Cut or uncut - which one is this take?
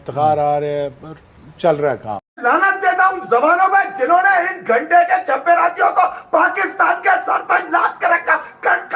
cut